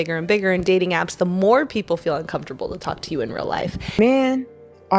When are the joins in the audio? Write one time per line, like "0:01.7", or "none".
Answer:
0:04.0

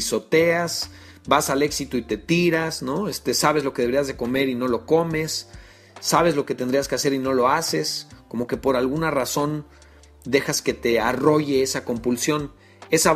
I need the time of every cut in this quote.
none

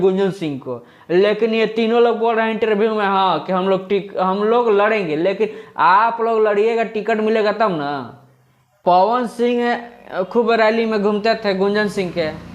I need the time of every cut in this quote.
0:08.8

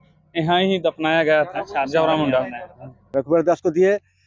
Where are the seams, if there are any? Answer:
0:03.1

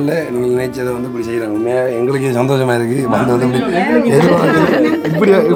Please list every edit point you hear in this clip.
none

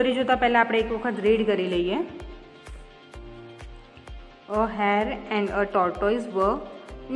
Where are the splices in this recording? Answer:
0:02.3
0:04.4

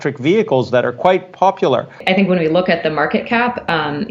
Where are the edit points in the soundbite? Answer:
0:02.0

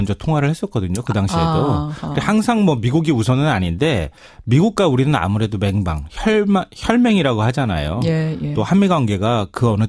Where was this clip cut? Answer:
0:07.6

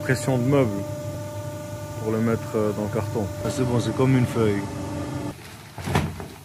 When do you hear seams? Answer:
0:03.4
0:05.3

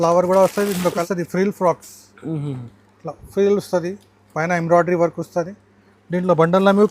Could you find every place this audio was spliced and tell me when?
0:01.0

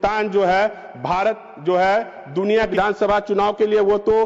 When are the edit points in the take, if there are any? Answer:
0:02.7

